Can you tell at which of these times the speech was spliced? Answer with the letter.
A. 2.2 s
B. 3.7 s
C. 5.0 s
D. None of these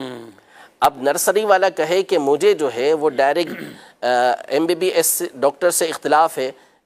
D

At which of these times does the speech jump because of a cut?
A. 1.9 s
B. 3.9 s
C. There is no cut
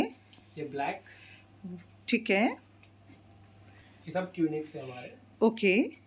B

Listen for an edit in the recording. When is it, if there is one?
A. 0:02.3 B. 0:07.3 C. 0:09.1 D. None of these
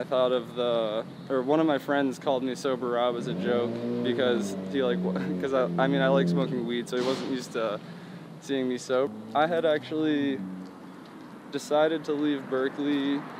C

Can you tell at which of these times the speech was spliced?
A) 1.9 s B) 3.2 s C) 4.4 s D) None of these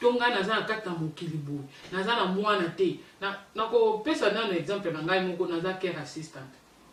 D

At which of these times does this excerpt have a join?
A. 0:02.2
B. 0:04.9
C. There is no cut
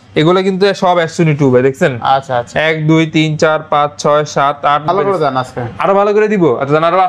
B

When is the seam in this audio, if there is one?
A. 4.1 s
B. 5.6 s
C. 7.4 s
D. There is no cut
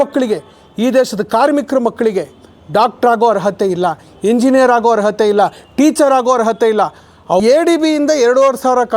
C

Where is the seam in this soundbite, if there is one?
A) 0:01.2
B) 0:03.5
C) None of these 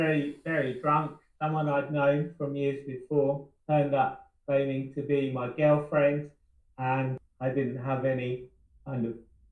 B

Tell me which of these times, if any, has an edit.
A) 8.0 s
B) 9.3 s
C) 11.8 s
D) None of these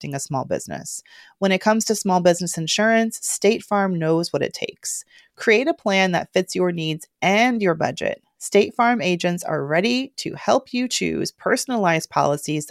D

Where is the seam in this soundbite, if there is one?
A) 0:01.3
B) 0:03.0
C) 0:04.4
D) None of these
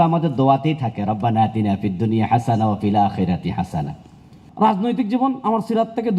C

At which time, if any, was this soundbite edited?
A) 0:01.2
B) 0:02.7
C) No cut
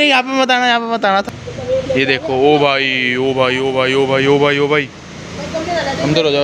A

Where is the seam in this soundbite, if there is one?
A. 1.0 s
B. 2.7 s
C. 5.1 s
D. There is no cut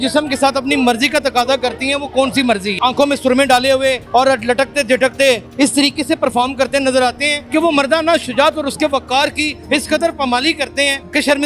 B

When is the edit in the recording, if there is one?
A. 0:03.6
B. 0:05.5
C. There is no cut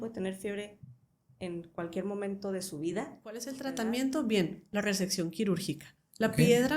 A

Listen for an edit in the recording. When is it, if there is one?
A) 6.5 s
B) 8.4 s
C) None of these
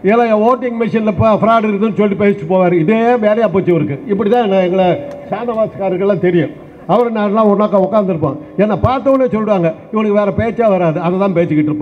C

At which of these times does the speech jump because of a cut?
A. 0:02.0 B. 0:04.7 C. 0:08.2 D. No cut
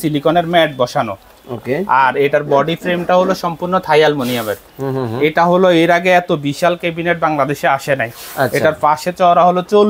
B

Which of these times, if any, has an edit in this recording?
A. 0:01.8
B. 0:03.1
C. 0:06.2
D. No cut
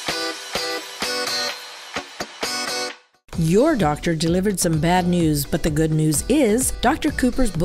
B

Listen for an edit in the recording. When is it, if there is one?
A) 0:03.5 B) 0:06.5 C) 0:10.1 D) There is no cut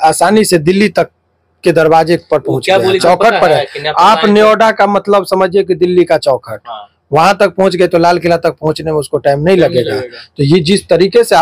D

